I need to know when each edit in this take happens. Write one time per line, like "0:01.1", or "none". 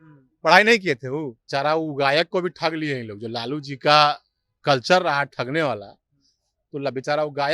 0:01.4